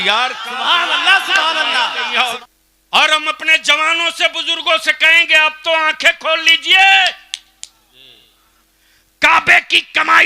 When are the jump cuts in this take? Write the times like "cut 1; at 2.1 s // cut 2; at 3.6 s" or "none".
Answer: cut 1; at 2.4 s